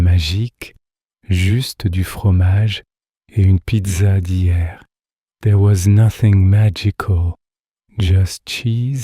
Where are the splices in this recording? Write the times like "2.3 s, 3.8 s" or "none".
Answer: none